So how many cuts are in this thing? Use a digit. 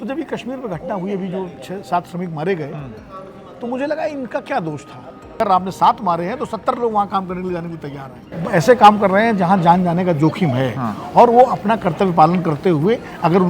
2